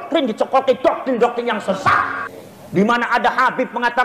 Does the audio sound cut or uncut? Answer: cut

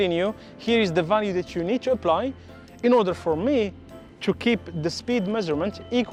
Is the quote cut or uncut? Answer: uncut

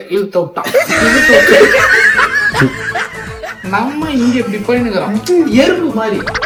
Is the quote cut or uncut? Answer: uncut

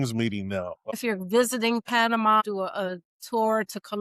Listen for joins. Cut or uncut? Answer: cut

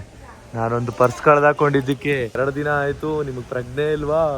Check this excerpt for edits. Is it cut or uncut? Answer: cut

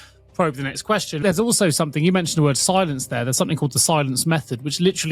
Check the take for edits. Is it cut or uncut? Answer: cut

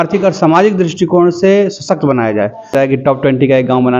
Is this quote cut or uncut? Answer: cut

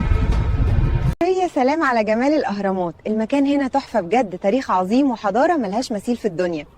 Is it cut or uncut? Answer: cut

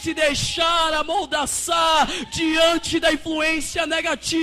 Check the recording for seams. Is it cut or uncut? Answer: uncut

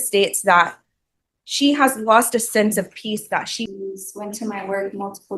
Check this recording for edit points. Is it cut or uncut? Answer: cut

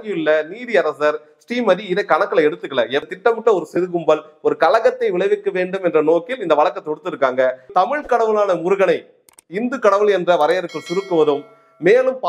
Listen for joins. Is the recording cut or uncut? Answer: cut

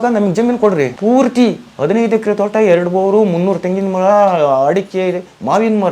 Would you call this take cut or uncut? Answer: cut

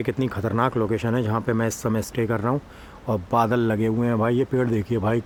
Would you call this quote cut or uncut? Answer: uncut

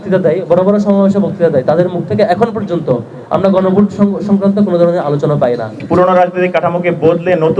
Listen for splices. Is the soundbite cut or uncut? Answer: cut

